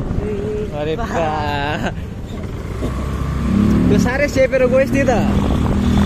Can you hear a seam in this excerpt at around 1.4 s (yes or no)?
no